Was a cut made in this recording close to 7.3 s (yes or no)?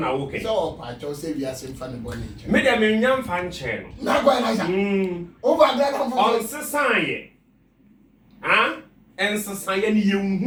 no